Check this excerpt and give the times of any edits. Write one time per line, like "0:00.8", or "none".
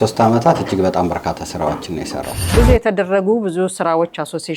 0:02.4

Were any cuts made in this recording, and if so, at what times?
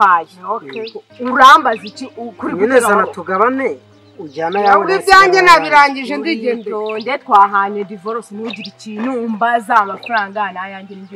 none

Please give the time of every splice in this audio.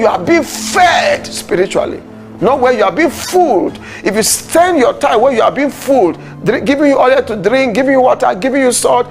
none

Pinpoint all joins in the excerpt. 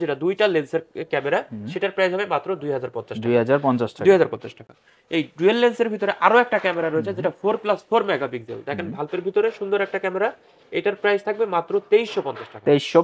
none

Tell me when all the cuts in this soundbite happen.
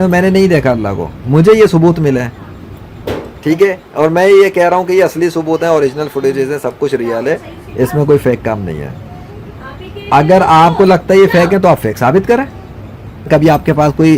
0:13.3

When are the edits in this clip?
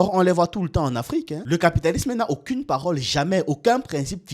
0:01.3

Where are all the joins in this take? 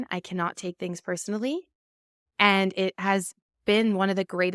none

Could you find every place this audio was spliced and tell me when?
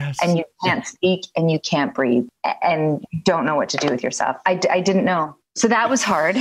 0:02.3
0:05.4

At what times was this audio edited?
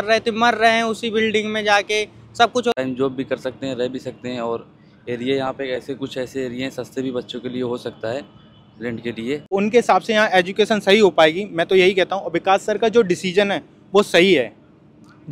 0:02.7
0:09.5

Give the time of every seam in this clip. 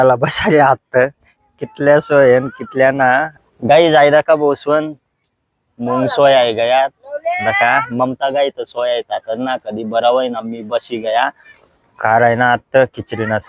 0:03.4
0:11.5

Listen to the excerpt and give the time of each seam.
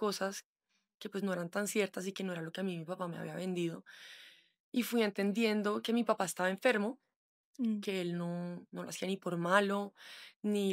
none

